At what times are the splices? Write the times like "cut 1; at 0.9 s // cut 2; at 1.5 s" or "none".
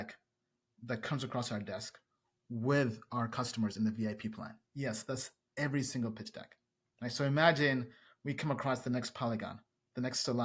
none